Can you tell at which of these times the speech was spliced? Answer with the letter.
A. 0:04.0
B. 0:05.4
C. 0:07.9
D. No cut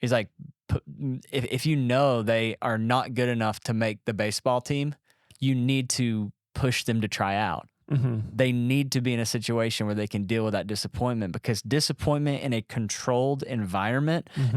B